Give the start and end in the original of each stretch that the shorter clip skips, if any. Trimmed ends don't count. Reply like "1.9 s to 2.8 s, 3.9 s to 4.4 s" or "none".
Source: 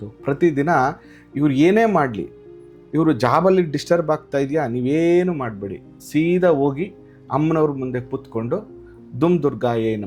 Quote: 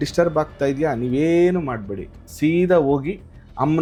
none